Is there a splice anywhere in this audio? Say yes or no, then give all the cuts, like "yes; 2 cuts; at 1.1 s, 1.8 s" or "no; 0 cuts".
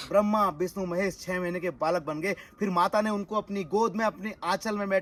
no; 0 cuts